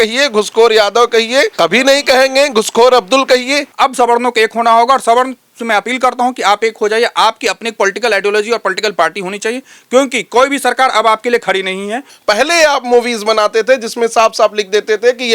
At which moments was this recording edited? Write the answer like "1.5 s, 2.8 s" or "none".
1.5 s, 3.7 s, 12.1 s